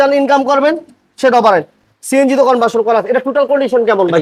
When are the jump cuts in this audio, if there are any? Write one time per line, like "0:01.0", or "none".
none